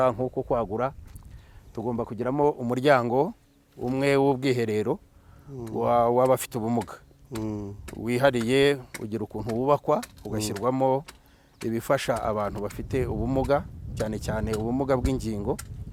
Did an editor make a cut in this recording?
no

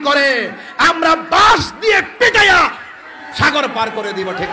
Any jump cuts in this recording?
no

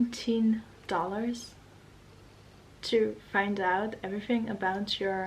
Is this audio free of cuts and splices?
yes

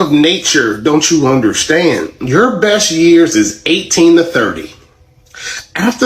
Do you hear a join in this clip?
no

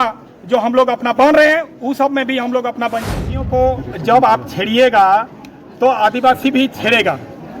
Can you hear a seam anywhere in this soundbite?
yes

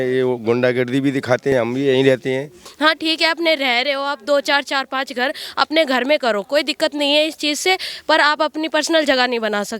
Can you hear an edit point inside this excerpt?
yes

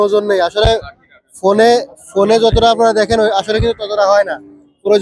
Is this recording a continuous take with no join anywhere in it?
yes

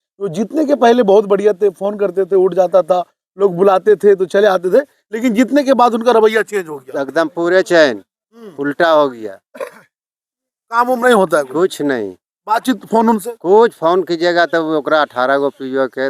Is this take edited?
no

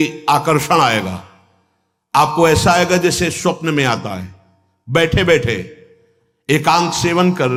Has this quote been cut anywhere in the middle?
no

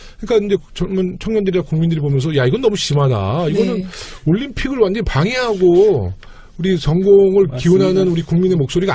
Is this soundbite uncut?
no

